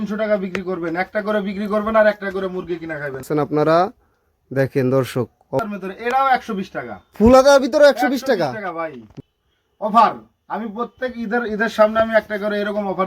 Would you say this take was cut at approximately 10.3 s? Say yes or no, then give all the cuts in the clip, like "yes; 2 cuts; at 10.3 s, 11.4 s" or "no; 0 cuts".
no; 3 cuts; at 3.2 s, 5.6 s, 9.0 s